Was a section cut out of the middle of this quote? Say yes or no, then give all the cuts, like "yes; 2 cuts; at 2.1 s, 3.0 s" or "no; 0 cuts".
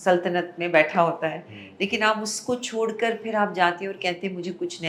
no; 0 cuts